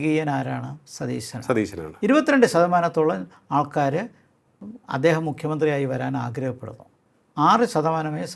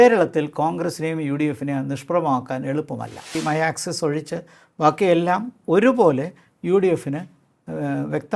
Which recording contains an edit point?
second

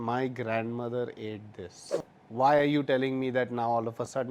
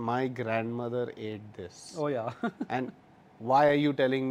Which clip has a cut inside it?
first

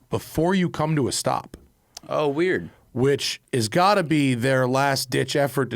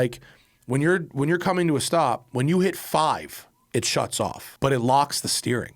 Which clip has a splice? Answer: second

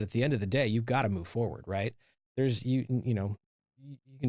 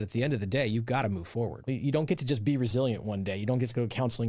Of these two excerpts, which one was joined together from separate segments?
second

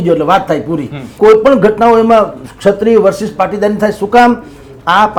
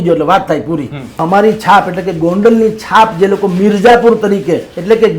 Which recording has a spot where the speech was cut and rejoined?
second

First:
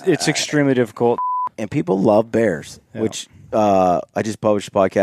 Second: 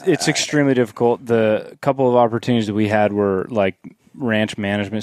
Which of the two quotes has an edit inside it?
first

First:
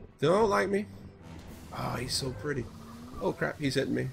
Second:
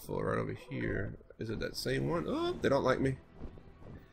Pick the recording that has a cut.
second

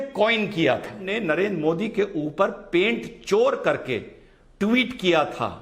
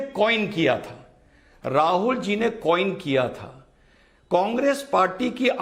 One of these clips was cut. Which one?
first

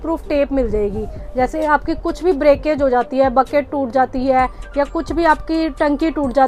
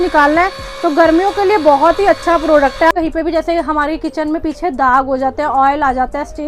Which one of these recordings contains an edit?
second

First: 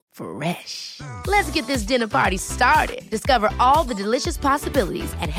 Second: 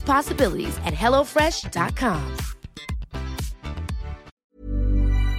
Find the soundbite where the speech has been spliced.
second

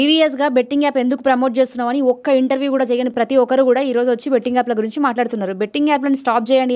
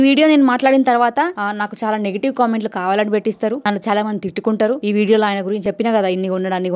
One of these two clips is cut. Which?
second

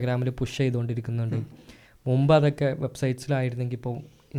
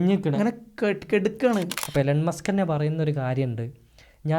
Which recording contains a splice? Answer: second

